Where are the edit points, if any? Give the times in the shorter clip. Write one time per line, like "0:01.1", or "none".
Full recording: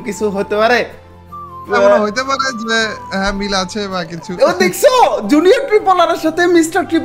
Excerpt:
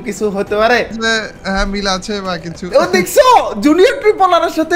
0:01.0